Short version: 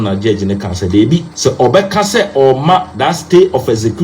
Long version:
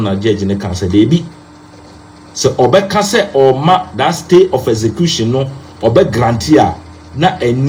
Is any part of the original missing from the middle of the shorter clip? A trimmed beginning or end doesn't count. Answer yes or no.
yes